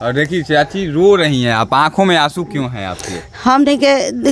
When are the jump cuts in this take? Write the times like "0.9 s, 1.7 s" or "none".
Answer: none